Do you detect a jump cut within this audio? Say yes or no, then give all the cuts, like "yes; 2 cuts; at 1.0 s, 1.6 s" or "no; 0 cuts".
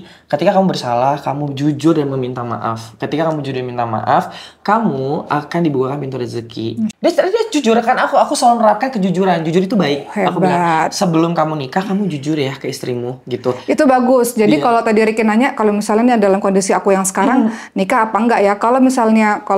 yes; 1 cut; at 6.9 s